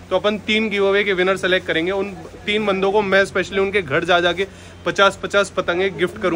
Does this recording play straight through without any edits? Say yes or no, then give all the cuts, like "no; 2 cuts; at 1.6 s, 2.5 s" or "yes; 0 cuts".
yes; 0 cuts